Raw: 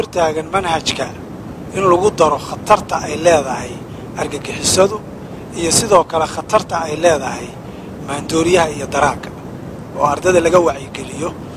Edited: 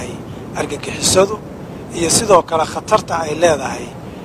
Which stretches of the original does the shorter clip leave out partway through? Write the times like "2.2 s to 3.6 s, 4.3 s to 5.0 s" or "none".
none